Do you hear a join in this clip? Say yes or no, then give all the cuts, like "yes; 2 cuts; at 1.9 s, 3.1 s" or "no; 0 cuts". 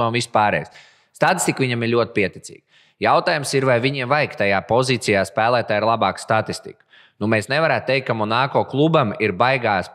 no; 0 cuts